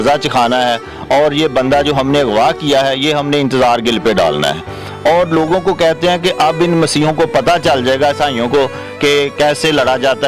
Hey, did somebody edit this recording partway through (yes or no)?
no